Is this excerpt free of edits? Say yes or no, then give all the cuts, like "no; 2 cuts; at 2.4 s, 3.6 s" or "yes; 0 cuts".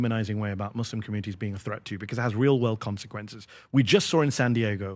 yes; 0 cuts